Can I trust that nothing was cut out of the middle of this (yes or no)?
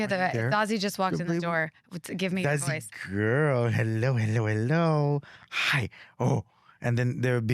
yes